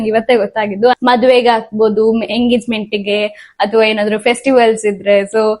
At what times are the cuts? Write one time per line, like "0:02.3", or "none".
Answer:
0:01.0

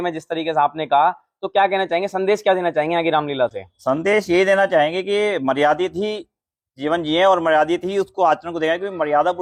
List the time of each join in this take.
none

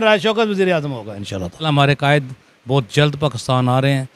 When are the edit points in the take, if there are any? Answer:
0:01.6

